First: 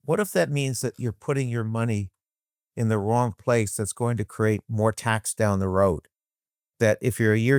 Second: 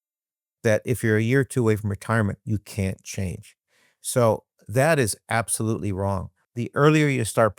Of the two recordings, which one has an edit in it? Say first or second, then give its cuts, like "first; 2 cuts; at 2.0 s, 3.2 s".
second; 1 cut; at 6.4 s